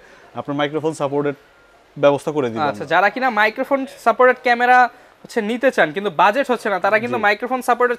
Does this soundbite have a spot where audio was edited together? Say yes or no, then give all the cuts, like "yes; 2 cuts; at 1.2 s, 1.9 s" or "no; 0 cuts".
no; 0 cuts